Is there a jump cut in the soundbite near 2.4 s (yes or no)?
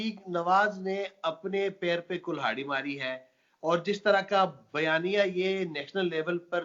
no